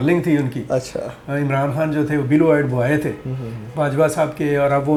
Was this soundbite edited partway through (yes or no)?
no